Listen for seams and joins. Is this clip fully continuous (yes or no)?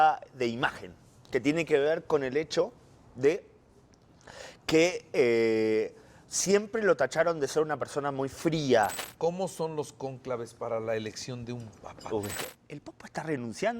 no